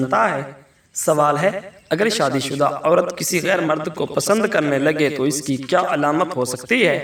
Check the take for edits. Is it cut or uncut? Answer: uncut